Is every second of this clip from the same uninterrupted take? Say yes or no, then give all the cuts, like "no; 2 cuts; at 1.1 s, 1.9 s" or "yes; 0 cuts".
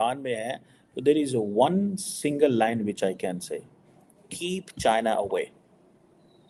yes; 0 cuts